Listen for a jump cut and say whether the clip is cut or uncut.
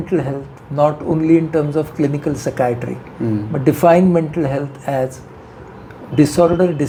uncut